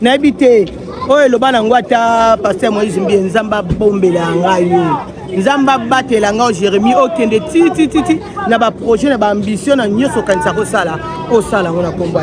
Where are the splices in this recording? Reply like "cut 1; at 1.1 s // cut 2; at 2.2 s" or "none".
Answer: none

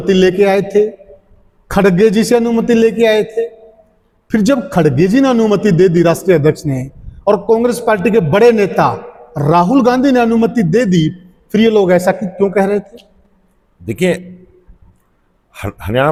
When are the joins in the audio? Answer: none

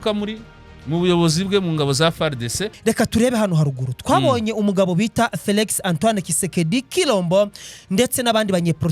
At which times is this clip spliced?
cut 1; at 2.6 s

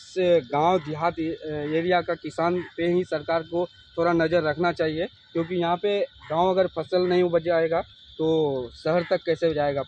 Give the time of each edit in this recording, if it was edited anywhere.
none

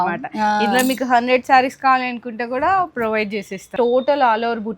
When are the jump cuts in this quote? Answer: cut 1; at 3.6 s

